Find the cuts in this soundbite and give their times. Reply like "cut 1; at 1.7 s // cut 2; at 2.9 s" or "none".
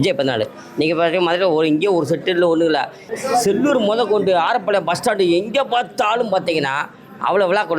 cut 1; at 3.1 s